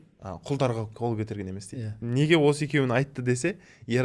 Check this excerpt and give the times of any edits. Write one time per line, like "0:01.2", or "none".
0:00.9
0:02.0